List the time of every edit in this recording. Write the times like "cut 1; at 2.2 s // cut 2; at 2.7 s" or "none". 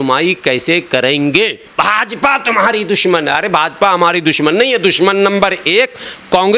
cut 1; at 1.6 s